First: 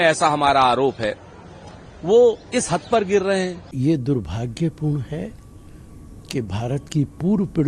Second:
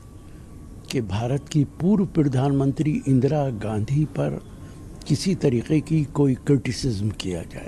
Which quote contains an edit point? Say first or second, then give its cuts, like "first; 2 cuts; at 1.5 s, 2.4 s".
first; 1 cut; at 3.6 s